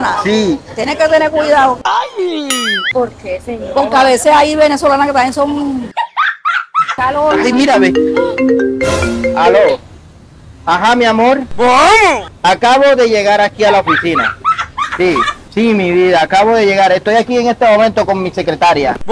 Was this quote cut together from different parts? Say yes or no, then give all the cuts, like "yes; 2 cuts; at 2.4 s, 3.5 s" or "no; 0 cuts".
yes; 1 cut; at 7.0 s